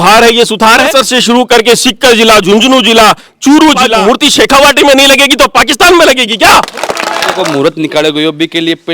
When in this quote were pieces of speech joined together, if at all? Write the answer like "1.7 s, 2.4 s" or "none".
0.9 s, 3.9 s, 7.4 s